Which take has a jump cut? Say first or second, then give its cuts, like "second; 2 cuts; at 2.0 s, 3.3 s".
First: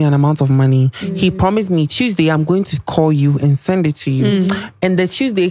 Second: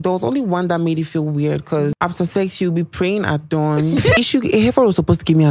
second; 2 cuts; at 1.9 s, 4.2 s